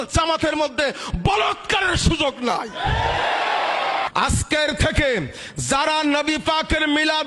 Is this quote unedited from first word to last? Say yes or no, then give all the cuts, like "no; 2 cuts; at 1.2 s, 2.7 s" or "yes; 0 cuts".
no; 1 cut; at 4.1 s